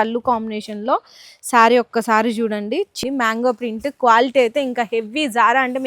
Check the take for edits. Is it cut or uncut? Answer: cut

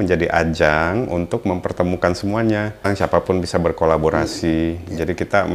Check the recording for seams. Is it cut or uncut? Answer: cut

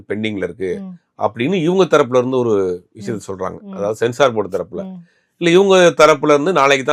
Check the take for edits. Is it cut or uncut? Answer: uncut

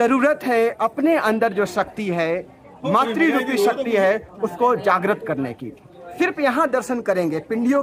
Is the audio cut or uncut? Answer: uncut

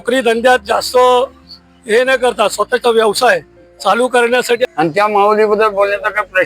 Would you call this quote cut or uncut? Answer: cut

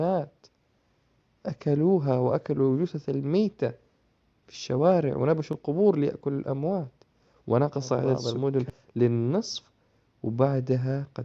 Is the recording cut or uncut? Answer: cut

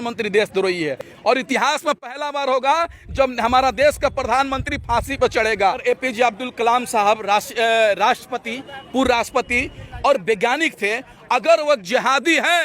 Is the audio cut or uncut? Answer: cut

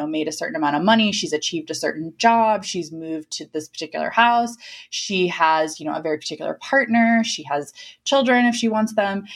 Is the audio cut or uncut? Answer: uncut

